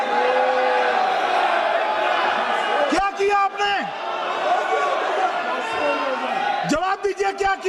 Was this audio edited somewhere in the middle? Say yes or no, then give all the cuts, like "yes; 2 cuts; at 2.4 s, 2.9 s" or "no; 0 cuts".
no; 0 cuts